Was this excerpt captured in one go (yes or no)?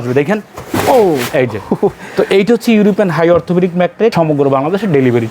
no